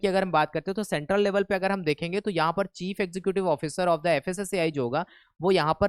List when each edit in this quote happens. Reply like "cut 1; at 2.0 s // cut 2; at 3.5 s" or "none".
none

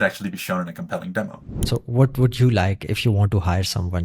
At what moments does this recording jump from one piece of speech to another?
cut 1; at 1.5 s

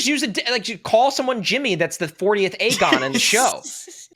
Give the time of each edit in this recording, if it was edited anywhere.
none

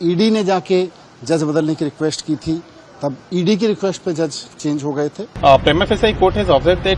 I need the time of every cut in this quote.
cut 1; at 5.2 s

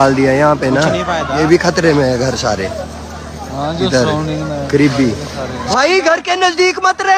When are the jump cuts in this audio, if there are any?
cut 1; at 1.4 s // cut 2; at 5.7 s

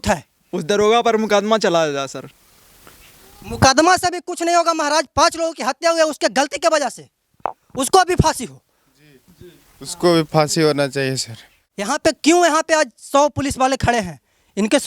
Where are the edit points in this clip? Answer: cut 1; at 0.8 s // cut 2; at 11.9 s

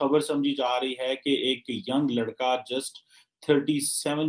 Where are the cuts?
none

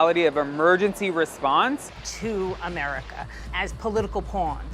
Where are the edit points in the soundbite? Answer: cut 1; at 1.9 s

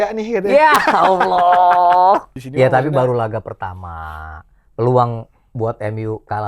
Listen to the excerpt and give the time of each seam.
cut 1; at 2.4 s

